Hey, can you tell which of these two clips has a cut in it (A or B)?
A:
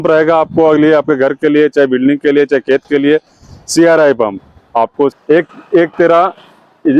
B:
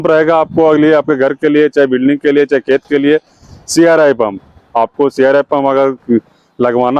A